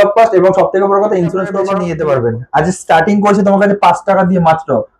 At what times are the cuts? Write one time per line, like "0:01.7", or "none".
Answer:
0:01.8